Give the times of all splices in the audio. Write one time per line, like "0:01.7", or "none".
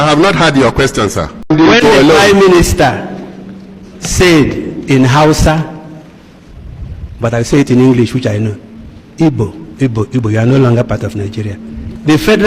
0:01.3

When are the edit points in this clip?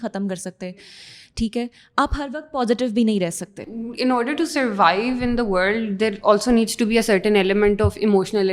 0:03.6

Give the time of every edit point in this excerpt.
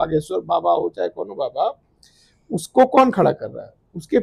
none

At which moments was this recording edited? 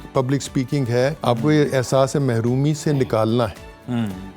0:01.2

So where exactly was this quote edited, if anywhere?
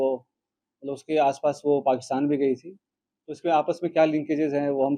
none

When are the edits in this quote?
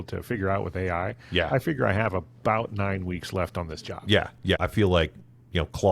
0:04.6

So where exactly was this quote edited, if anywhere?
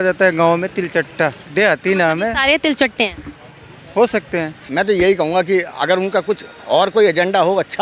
0:01.4
0:04.7

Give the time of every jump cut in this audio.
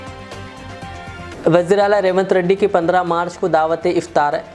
none

